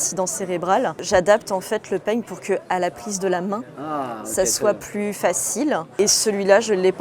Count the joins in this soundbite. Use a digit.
2